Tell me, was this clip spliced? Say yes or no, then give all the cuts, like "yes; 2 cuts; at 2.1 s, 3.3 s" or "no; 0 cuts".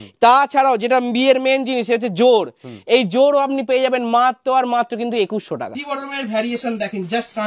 yes; 1 cut; at 5.9 s